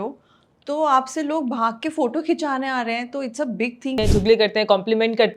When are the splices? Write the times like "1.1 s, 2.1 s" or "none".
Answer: 4.0 s

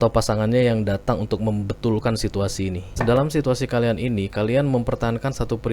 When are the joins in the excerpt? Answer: 3.0 s

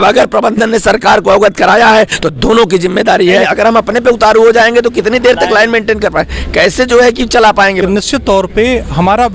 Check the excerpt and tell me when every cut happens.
3.5 s, 7.8 s

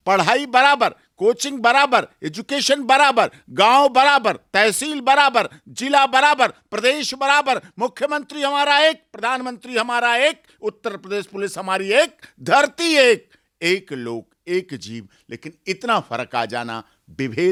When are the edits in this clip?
none

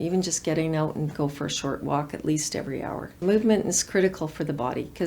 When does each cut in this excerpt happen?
3.2 s

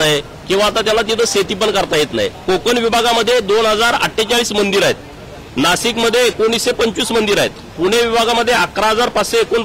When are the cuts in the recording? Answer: 2.3 s

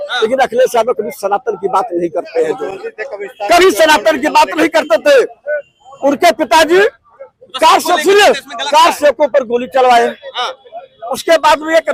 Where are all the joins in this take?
none

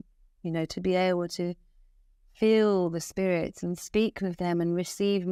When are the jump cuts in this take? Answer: none

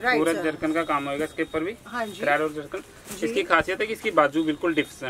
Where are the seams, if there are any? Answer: none

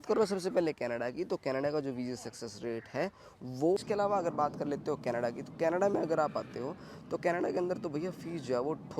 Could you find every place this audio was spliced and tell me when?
3.8 s

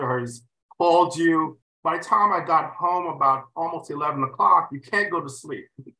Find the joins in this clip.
1.6 s

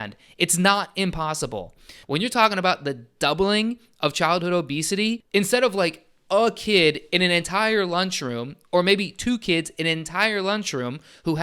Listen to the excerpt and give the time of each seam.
1.9 s, 5.2 s

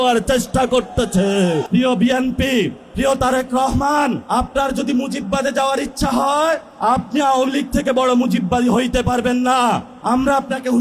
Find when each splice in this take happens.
1.7 s, 2.8 s, 4.2 s, 6.7 s, 9.9 s

